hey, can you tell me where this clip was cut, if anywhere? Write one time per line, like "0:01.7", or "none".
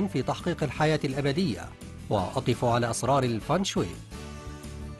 0:03.9